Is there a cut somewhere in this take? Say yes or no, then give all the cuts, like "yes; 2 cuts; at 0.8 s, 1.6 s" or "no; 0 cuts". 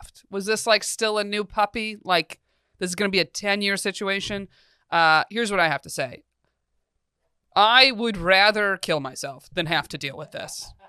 no; 0 cuts